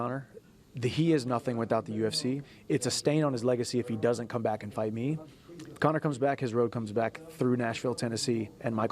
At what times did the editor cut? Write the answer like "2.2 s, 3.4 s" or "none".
2.5 s, 5.2 s